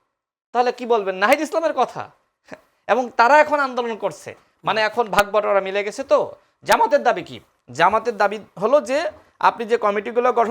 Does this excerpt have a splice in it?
no; 0 cuts

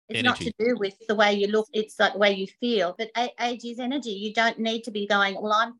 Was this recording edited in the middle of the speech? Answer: yes; 3 cuts; at 1.0 s, 1.7 s, 3.0 s

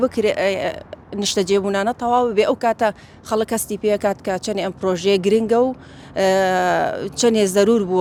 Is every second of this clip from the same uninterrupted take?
yes; 0 cuts

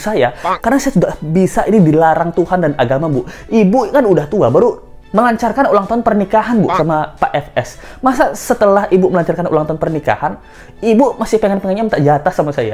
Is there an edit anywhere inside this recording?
no; 0 cuts

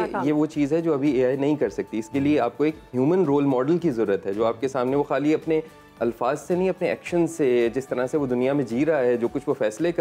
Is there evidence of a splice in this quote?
no; 0 cuts

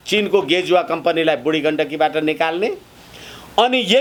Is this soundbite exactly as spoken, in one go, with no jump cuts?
yes; 0 cuts

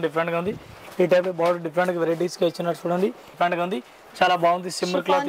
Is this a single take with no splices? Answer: no; 1 cut; at 3.3 s

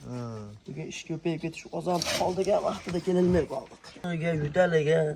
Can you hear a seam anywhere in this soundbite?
yes; 1 cut; at 4.1 s

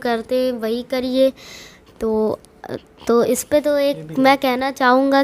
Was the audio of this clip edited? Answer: no; 0 cuts

